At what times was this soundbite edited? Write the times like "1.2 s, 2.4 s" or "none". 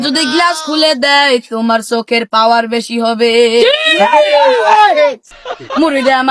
5.3 s